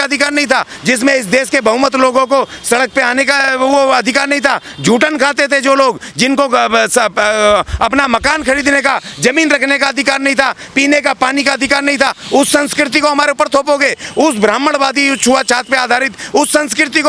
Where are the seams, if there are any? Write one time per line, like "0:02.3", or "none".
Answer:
none